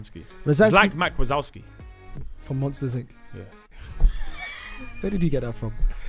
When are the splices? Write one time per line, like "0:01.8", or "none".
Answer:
none